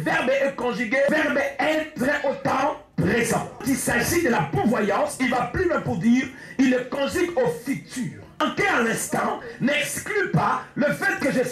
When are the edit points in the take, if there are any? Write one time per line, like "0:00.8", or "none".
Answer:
0:01.1
0:03.6
0:08.4

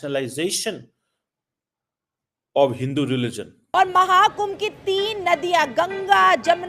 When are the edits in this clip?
0:03.6

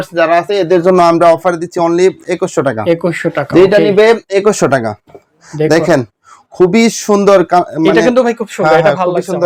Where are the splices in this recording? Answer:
none

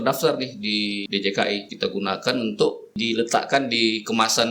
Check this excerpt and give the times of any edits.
0:01.0
0:01.7
0:03.0

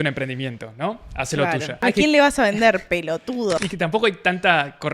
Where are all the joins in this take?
0:01.8
0:03.6

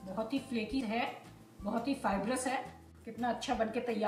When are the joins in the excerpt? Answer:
none

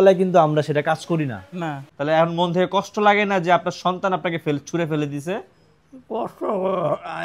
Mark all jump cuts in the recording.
0:01.9

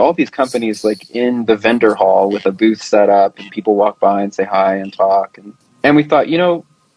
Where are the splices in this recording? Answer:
none

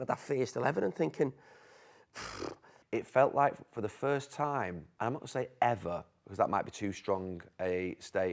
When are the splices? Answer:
0:02.7
0:04.8

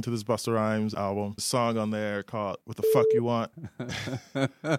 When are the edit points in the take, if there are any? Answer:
0:01.1
0:02.6
0:03.7

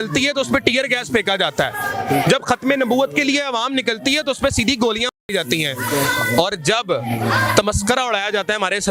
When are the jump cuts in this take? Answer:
none

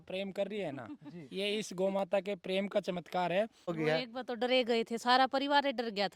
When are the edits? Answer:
0:03.8

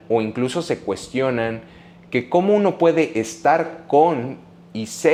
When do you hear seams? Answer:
none

